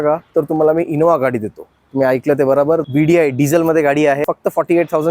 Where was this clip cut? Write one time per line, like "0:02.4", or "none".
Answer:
0:02.9
0:04.2